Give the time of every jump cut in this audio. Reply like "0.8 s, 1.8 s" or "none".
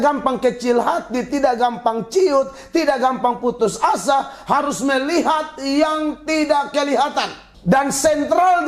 7.4 s